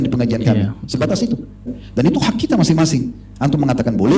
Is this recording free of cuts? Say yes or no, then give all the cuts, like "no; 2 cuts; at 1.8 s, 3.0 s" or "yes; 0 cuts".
no; 1 cut; at 1.8 s